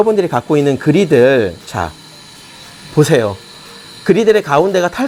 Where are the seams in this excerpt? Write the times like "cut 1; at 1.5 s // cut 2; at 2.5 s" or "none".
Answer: none